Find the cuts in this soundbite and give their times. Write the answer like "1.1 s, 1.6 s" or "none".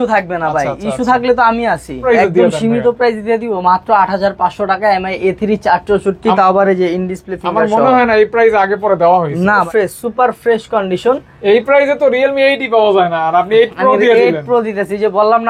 2.0 s, 9.7 s